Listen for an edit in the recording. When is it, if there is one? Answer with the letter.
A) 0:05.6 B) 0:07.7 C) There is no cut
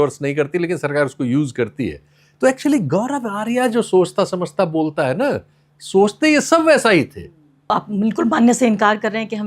B